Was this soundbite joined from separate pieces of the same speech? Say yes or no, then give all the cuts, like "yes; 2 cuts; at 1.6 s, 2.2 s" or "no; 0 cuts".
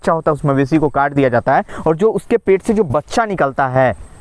no; 0 cuts